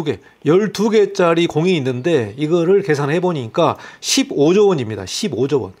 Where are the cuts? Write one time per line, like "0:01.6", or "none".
none